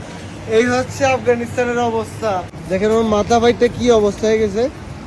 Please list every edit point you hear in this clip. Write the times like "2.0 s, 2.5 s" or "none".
2.5 s